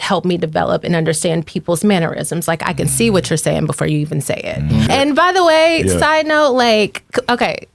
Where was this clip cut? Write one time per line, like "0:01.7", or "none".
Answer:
0:04.9

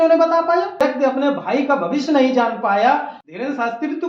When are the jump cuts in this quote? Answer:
0:00.8
0:03.2

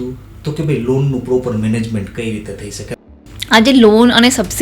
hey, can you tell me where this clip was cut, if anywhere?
0:02.9

